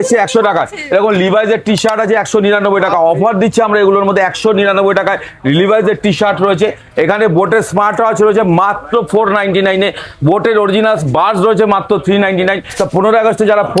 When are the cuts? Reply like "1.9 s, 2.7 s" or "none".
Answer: 12.7 s